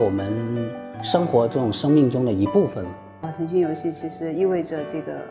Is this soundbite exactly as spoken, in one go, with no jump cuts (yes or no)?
yes